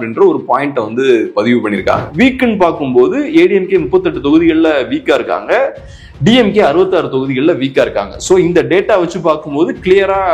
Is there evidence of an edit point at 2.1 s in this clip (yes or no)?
yes